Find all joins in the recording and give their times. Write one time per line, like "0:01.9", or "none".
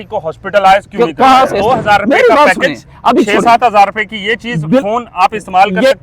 0:01.5